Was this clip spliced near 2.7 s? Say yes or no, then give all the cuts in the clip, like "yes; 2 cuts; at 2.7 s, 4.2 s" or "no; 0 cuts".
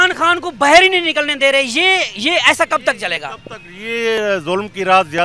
no; 0 cuts